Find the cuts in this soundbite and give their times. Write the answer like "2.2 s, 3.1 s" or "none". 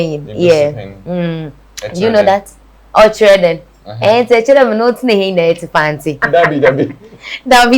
6.2 s